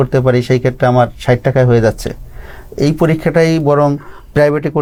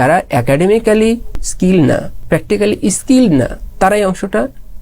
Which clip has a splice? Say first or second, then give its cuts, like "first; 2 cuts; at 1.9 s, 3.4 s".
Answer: second; 2 cuts; at 1.4 s, 2.1 s